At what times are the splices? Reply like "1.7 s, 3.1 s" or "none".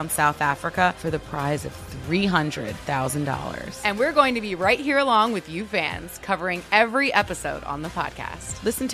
none